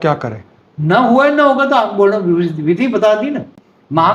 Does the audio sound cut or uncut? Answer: uncut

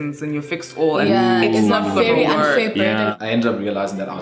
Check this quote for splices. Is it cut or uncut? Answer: cut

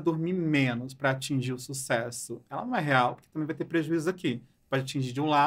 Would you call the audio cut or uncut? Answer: uncut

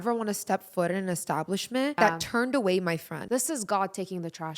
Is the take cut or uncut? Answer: cut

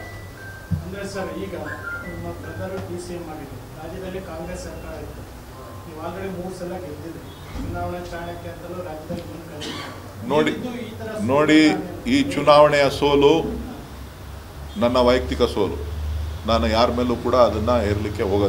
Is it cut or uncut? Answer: cut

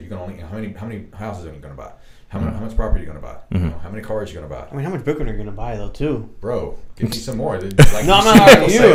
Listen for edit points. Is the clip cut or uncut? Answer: uncut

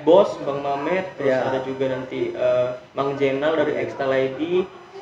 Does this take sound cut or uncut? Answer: uncut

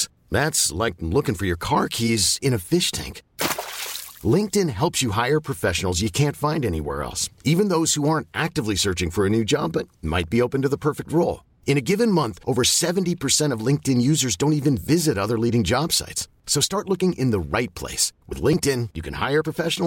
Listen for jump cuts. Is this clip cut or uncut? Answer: uncut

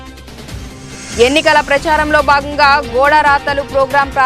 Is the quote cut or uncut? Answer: cut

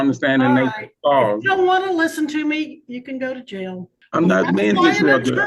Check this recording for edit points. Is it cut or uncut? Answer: cut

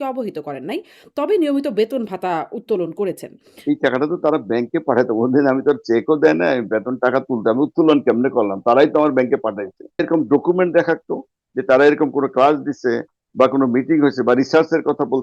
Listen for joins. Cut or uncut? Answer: cut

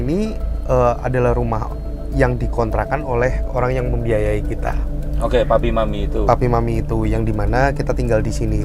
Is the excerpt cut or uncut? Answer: uncut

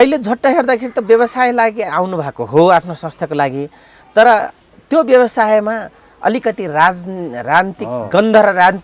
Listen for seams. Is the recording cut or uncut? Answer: uncut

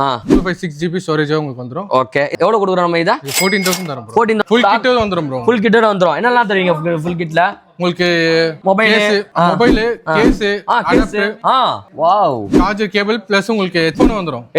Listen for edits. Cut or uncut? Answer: cut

